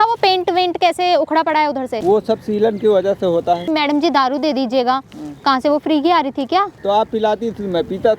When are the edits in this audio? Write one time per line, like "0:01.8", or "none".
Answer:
0:01.9
0:03.6
0:06.7